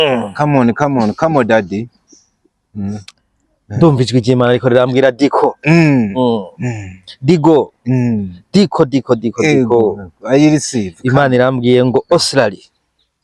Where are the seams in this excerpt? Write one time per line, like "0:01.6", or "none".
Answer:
none